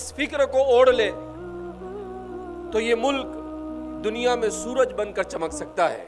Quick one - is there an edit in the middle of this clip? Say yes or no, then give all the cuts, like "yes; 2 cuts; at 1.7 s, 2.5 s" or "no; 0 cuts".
no; 0 cuts